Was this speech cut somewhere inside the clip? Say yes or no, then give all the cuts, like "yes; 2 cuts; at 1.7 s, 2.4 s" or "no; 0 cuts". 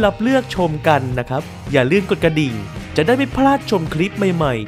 no; 0 cuts